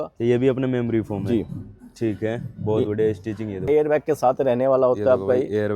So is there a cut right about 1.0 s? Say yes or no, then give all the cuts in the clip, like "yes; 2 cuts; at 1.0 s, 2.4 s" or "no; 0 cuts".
no; 1 cut; at 3.7 s